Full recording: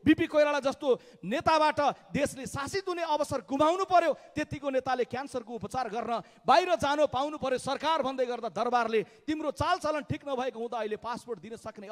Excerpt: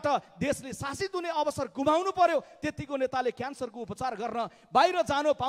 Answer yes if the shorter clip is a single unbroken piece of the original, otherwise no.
yes